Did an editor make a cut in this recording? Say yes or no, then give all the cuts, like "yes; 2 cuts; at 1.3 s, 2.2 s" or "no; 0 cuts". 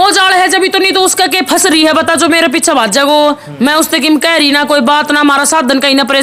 no; 0 cuts